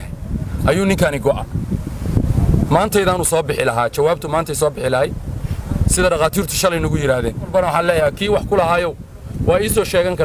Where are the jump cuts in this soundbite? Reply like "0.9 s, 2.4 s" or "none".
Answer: 7.5 s